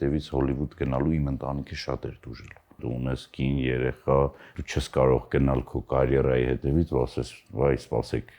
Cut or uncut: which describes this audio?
cut